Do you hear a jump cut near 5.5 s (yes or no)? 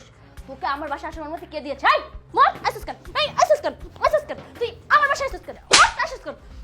yes